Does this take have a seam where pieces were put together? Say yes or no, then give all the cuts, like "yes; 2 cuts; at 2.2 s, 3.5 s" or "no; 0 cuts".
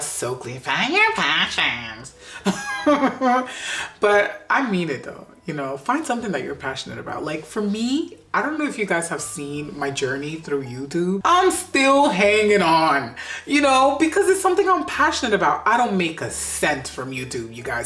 no; 0 cuts